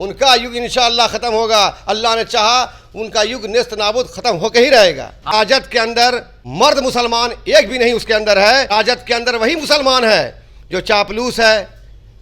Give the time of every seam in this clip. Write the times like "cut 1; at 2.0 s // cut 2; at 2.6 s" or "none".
cut 1; at 5.3 s // cut 2; at 6.4 s // cut 3; at 8.7 s